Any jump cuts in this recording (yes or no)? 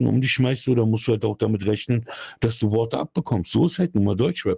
no